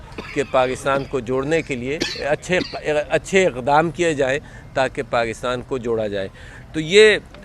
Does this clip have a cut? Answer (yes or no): yes